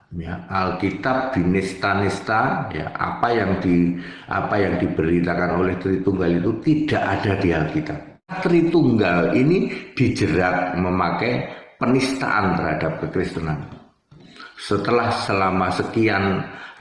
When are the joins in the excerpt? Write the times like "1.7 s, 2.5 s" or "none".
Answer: 8.3 s